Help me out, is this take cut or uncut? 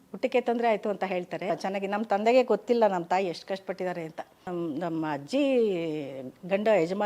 cut